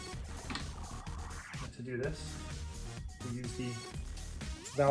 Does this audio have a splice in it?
no; 0 cuts

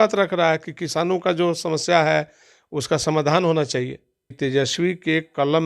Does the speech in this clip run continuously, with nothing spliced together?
no; 1 cut; at 4.3 s

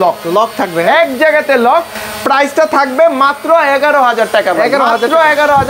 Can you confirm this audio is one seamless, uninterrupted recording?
yes; 0 cuts

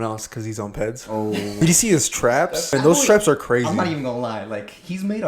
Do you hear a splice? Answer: yes; 2 cuts; at 1.6 s, 2.7 s

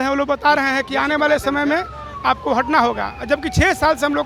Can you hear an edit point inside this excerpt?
no; 0 cuts

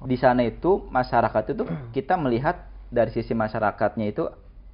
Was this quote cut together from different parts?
no; 0 cuts

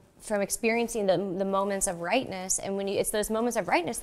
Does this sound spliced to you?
no; 0 cuts

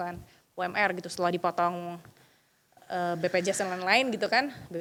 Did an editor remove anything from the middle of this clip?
no; 0 cuts

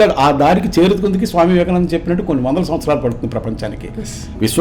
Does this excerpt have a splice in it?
no; 0 cuts

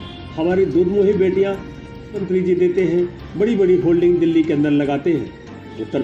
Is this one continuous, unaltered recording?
no; 1 cut; at 2.2 s

